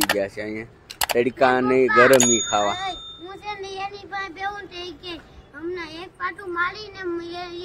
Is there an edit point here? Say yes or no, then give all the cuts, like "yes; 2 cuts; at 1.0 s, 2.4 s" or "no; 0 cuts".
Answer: no; 0 cuts